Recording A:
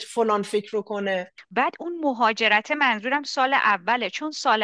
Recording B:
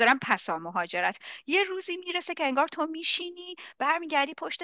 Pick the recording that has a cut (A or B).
A